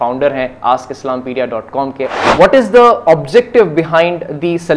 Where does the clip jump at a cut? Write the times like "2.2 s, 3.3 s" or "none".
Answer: 2.1 s

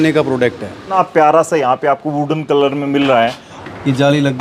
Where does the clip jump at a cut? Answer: 0.9 s, 3.5 s

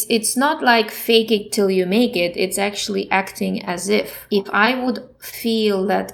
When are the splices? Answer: 0.9 s, 4.2 s

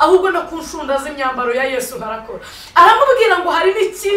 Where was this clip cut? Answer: none

